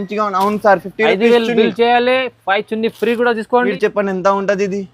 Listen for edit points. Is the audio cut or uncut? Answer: cut